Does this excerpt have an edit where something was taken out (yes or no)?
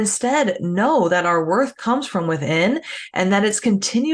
no